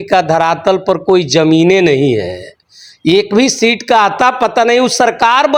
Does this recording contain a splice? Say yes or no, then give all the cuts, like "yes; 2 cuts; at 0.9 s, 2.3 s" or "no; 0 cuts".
no; 0 cuts